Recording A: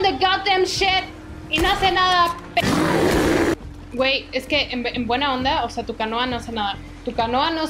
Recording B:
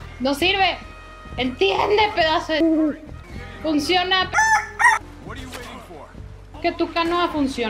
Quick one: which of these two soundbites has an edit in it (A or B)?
B